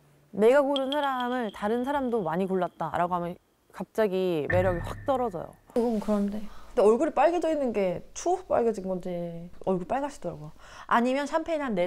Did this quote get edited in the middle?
yes; 1 cut; at 5.8 s

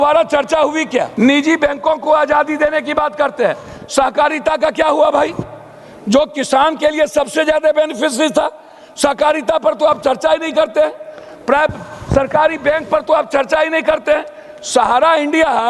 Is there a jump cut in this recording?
yes; 1 cut; at 1.1 s

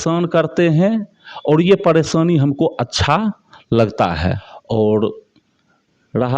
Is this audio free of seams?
no; 1 cut; at 4.5 s

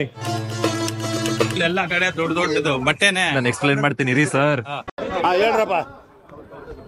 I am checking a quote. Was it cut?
no; 0 cuts

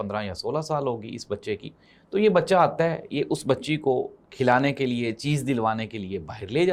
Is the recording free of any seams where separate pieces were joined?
yes; 0 cuts

